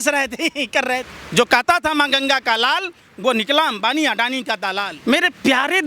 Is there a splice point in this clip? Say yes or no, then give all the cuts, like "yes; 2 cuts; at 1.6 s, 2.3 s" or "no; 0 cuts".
yes; 2 cuts; at 1.2 s, 4.9 s